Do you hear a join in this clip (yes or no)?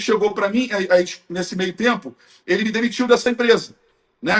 no